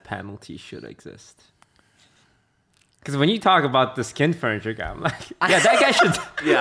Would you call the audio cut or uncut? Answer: uncut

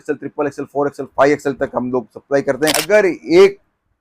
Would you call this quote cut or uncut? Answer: cut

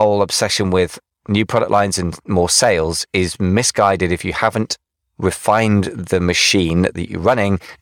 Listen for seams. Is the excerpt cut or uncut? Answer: uncut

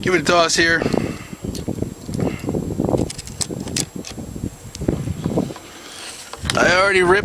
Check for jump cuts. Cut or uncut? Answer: cut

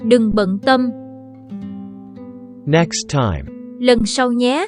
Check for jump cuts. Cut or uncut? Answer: uncut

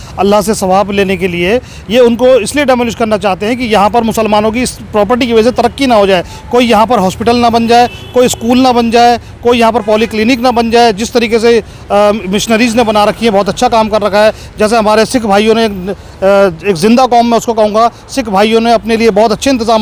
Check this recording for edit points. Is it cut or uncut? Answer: uncut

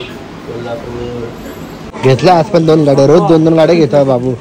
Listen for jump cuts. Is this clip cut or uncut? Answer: cut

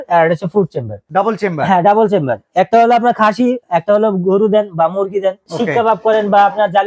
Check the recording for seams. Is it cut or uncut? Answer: cut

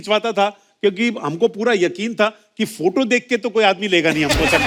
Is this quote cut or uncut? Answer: uncut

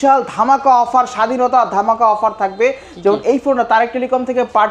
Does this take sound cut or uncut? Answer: uncut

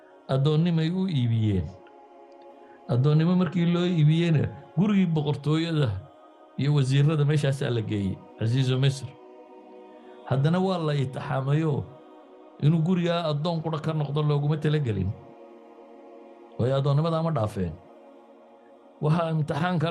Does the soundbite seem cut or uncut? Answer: uncut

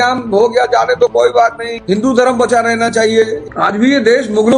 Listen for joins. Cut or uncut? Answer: cut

